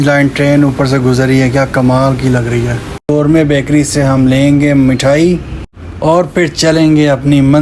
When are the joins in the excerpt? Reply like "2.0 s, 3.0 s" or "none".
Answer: 3.1 s